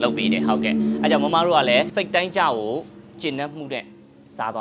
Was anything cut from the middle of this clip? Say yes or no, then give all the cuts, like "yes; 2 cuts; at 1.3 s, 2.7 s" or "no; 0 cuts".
yes; 1 cut; at 1.9 s